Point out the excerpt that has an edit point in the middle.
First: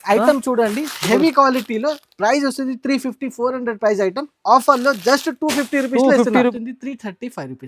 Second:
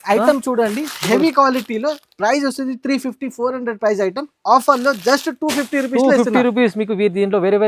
first; 1 cut; at 6.5 s

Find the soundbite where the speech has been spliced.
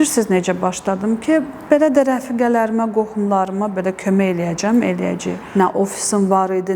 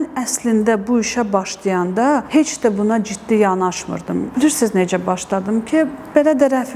first; 1 cut; at 5.3 s

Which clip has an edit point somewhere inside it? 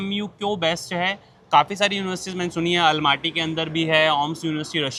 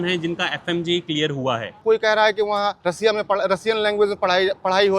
second; 1 cut; at 1.8 s

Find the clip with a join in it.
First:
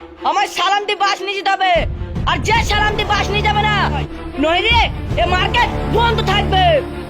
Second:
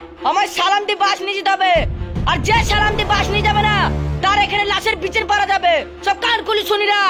first; 1 cut; at 4.1 s

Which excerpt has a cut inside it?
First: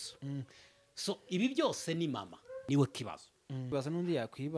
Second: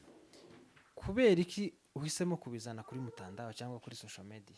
first; 2 cuts; at 2.5 s, 3.7 s

